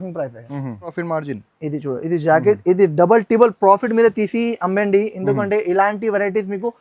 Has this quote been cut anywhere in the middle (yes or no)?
yes